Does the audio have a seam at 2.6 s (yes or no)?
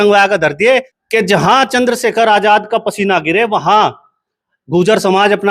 no